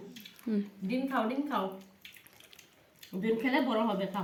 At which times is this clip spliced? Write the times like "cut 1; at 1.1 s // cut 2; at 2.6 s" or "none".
none